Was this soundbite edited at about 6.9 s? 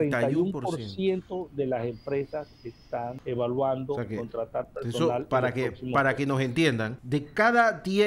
yes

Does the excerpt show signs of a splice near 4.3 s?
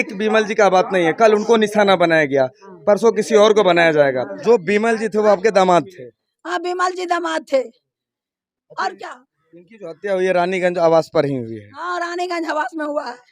yes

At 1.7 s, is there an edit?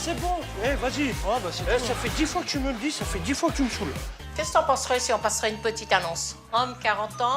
no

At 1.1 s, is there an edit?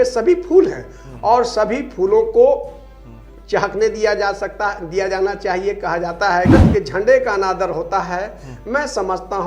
no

